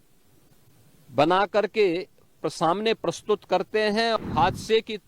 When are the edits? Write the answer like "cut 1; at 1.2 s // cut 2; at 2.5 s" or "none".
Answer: cut 1; at 4.2 s